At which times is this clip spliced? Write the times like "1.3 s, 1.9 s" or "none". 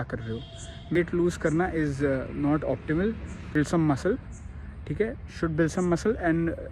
1.0 s, 3.6 s